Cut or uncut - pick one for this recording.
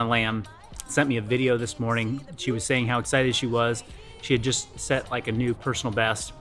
uncut